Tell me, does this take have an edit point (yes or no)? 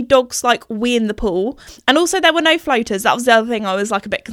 yes